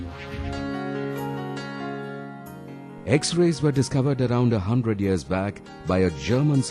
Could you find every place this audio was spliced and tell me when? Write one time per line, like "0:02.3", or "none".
none